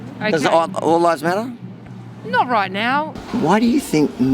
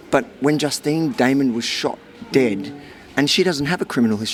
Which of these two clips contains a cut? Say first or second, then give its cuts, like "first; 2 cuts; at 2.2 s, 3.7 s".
first; 1 cut; at 3.2 s